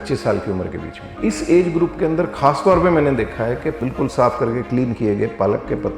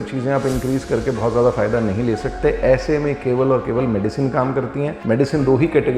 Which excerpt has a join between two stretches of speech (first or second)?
first